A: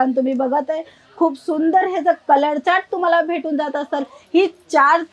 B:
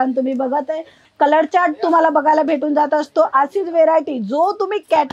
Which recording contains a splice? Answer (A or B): B